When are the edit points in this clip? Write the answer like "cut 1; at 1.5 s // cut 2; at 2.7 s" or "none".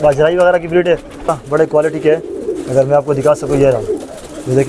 cut 1; at 1.2 s